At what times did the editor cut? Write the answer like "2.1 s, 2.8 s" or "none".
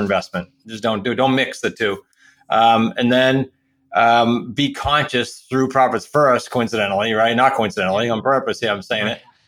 none